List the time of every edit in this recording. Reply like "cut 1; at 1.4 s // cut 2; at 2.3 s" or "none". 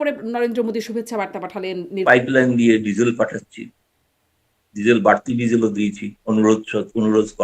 cut 1; at 1.9 s